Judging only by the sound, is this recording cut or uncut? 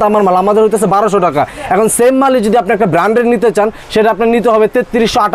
uncut